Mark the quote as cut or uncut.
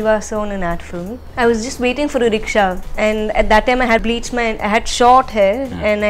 cut